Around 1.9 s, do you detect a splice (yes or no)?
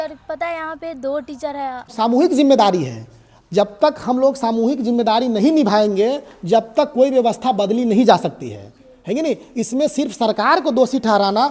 yes